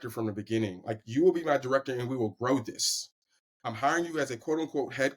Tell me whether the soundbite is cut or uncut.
uncut